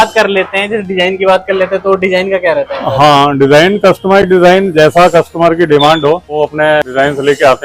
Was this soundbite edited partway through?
no; 0 cuts

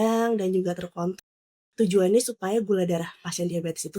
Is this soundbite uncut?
no; 1 cut; at 1.3 s

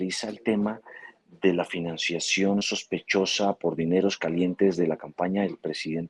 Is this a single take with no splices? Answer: yes; 0 cuts

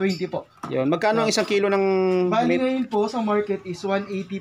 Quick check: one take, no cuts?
yes; 0 cuts

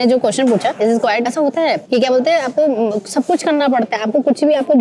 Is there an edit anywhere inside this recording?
no; 0 cuts

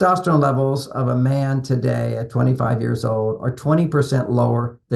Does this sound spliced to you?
no; 0 cuts

